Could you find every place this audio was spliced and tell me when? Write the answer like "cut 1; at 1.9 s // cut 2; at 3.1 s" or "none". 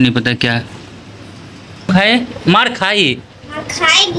cut 1; at 1.9 s